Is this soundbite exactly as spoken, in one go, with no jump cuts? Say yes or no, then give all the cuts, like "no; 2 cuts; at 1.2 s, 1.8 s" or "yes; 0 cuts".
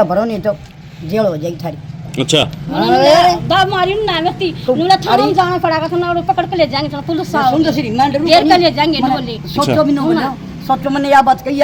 yes; 0 cuts